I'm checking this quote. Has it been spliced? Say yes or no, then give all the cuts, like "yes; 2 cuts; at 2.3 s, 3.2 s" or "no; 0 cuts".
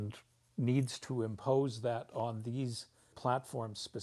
yes; 1 cut; at 3.0 s